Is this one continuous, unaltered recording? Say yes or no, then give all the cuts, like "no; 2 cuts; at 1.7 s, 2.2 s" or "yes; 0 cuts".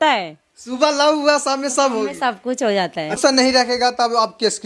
no; 1 cut; at 3.2 s